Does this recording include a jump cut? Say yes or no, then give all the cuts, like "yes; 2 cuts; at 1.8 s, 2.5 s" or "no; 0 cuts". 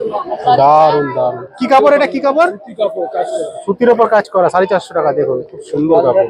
no; 0 cuts